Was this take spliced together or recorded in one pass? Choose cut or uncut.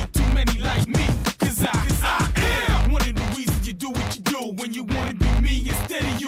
uncut